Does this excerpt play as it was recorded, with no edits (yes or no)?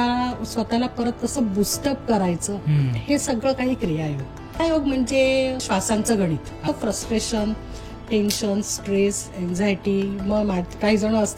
no